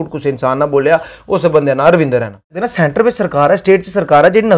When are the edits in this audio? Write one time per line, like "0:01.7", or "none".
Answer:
0:02.6